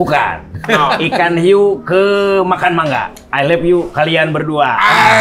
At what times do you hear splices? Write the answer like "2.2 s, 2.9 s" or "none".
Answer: 3.2 s